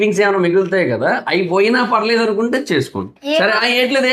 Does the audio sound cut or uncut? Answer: uncut